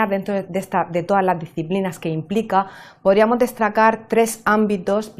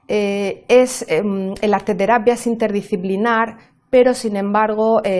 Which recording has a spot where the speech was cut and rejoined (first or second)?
second